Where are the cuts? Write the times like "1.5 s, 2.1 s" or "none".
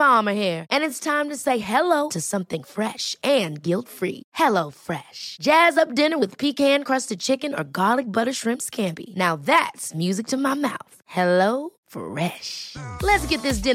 none